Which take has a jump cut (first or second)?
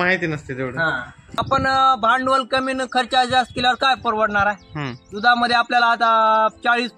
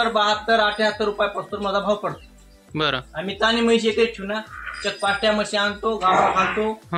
first